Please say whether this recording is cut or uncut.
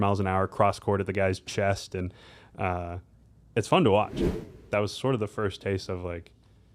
cut